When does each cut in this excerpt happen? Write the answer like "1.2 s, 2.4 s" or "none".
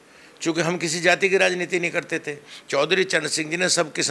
none